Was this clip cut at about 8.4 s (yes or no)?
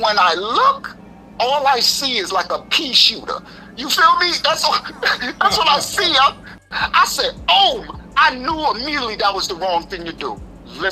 no